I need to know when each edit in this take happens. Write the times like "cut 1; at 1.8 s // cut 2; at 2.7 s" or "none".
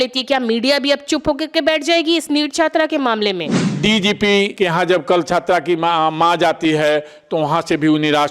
cut 1; at 3.6 s // cut 2; at 4.5 s